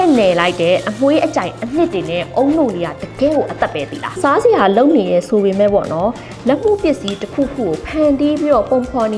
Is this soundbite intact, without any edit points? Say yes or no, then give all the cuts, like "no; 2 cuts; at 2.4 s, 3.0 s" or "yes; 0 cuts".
no; 1 cut; at 4.2 s